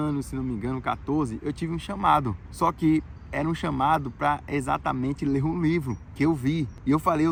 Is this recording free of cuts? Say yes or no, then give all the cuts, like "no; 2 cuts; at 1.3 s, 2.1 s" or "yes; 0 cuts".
yes; 0 cuts